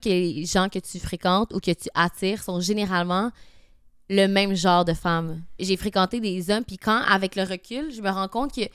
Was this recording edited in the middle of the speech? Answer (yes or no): yes